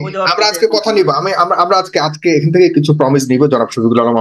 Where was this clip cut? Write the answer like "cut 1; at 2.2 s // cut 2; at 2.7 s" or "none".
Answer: none

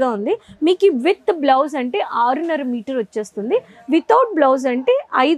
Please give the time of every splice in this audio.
none

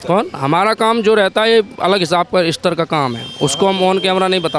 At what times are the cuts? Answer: none

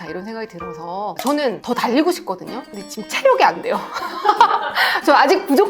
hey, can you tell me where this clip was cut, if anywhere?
cut 1; at 1.1 s

